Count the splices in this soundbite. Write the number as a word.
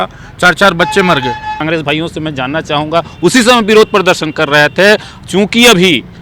one